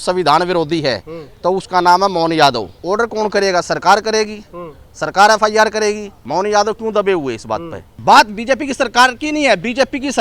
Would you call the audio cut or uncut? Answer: cut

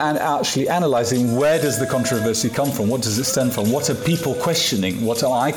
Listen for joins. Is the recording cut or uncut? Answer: uncut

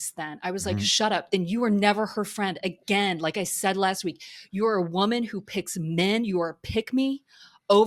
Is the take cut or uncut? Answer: uncut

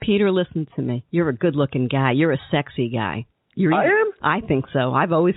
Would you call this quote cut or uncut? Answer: cut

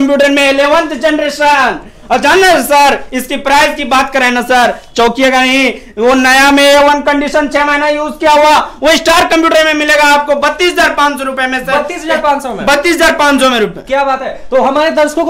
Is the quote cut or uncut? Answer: uncut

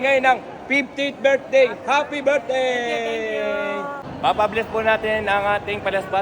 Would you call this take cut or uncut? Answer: cut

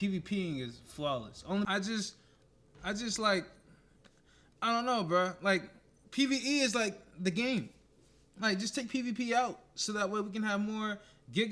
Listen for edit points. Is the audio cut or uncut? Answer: cut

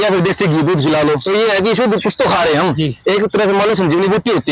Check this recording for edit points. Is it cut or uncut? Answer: cut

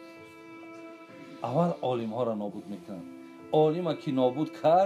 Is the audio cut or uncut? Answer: cut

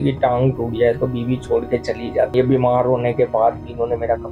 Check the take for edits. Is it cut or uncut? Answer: cut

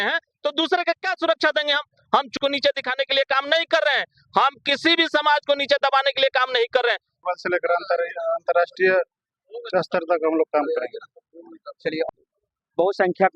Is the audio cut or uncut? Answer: cut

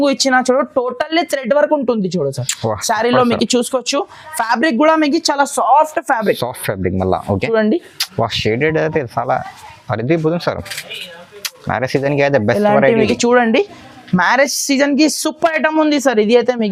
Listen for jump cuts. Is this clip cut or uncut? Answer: uncut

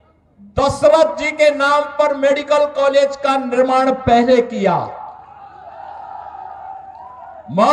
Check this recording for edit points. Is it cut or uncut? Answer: uncut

